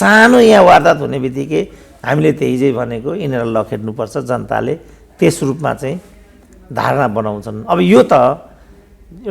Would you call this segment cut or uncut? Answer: uncut